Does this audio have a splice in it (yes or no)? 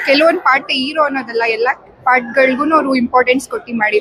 no